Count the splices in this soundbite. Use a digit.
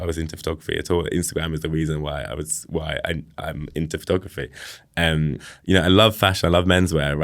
1